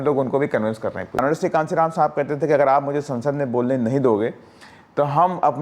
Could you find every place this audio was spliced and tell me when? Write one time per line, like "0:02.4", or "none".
0:01.2